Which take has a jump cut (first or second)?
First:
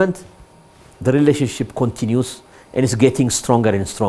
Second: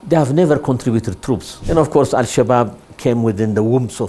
second